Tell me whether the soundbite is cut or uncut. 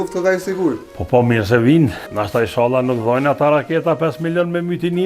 cut